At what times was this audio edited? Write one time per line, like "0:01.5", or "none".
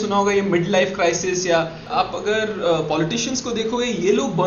0:01.9